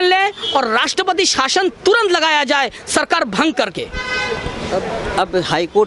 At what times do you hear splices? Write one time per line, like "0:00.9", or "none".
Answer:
none